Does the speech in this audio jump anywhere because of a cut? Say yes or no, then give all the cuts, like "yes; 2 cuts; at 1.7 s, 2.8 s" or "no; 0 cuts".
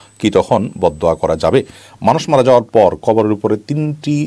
yes; 1 cut; at 1.8 s